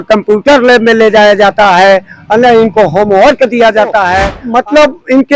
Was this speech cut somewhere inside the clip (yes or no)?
yes